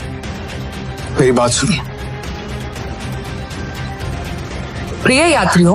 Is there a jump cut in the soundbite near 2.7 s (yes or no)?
yes